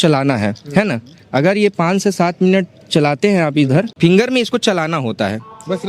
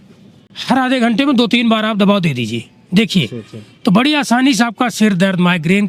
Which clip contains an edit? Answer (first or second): first